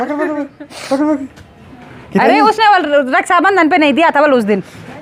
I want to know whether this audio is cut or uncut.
uncut